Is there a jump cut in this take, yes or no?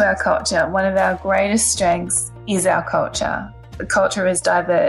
yes